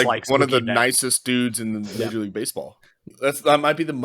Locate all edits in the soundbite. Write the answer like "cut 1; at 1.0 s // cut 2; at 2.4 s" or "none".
cut 1; at 3.1 s